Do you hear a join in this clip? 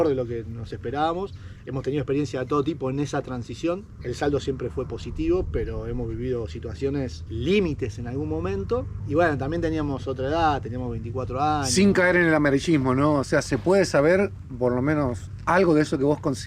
no; 0 cuts

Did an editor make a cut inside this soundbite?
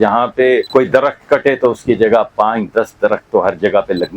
no; 0 cuts

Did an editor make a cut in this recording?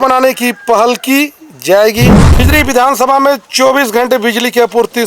yes; 1 cut; at 2.2 s

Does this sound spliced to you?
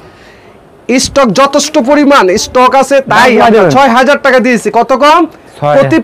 no; 0 cuts

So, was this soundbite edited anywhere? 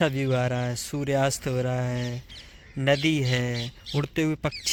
no; 0 cuts

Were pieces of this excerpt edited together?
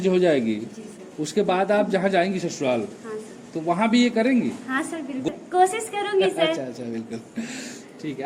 no; 0 cuts

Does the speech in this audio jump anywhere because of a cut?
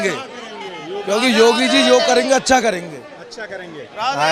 no; 0 cuts

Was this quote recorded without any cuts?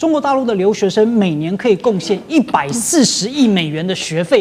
yes; 0 cuts

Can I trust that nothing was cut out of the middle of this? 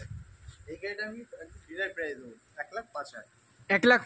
yes; 0 cuts

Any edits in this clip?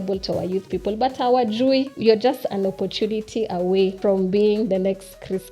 yes; 2 cuts; at 1.9 s, 4.0 s

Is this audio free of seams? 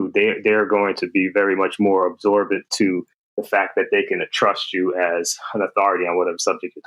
yes; 0 cuts

